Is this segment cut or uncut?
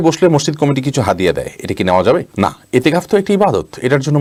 uncut